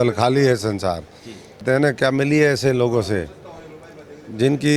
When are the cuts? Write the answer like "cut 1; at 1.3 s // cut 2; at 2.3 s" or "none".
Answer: cut 1; at 1.6 s

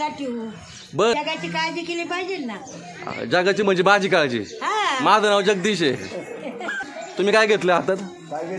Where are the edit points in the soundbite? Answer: cut 1; at 1.1 s // cut 2; at 6.9 s

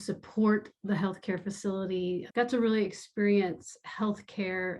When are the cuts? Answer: cut 1; at 2.3 s

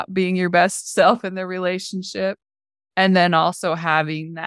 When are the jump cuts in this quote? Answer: none

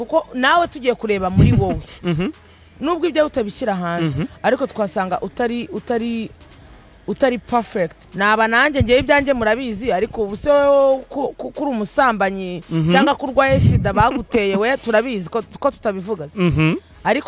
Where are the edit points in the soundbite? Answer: cut 1; at 8.0 s

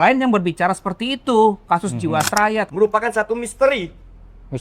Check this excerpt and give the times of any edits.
cut 1; at 2.7 s

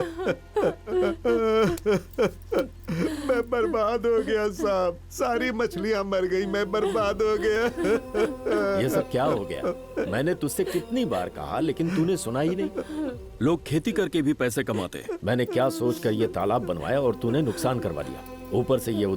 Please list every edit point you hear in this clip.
cut 1; at 0.9 s

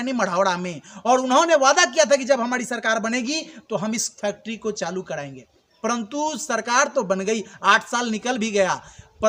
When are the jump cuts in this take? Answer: none

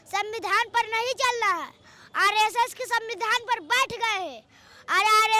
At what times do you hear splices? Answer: none

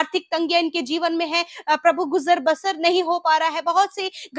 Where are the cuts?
none

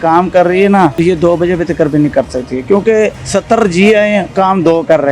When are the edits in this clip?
cut 1; at 1.0 s // cut 2; at 3.2 s

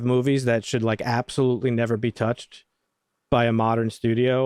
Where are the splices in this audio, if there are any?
none

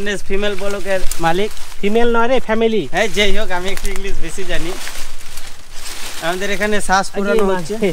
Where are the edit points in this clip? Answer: none

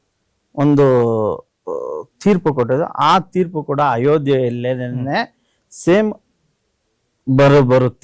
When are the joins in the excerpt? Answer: none

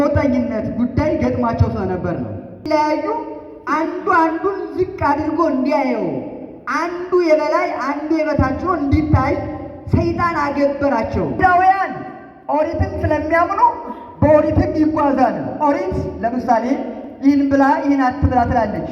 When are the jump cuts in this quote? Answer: cut 1; at 2.7 s // cut 2; at 11.4 s

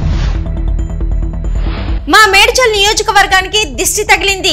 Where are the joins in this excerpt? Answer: cut 1; at 2.0 s

